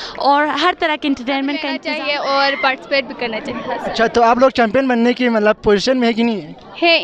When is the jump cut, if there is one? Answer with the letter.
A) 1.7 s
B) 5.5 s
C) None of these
A